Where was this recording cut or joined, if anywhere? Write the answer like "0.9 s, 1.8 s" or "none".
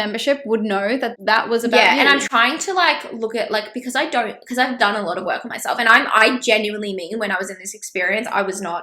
1.1 s